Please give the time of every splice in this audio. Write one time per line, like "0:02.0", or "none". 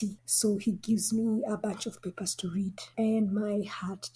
none